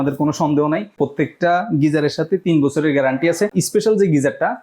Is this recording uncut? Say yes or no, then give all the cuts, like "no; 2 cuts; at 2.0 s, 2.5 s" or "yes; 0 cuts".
no; 2 cuts; at 0.9 s, 3.5 s